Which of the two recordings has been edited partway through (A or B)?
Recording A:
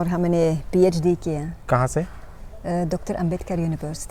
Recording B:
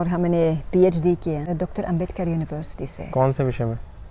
B